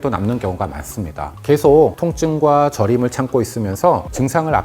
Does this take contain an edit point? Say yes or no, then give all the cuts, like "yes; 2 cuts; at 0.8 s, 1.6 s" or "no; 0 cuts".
yes; 1 cut; at 1.3 s